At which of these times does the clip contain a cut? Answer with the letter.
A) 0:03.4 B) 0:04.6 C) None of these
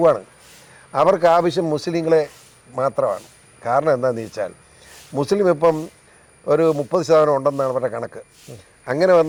C